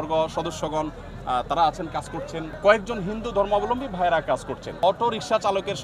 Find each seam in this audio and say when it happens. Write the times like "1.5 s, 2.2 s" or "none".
2.6 s, 4.7 s